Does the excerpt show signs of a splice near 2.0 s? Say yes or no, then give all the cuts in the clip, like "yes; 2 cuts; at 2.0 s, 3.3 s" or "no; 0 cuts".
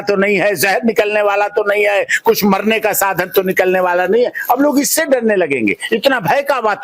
no; 0 cuts